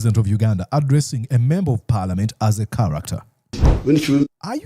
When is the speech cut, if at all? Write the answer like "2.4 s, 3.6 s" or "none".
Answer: 3.7 s